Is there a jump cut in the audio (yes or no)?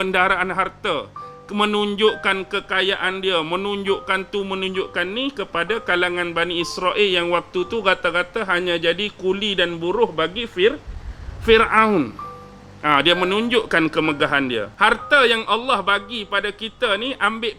yes